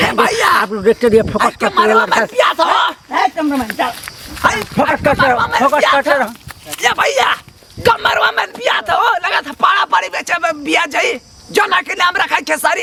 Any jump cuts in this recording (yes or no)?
no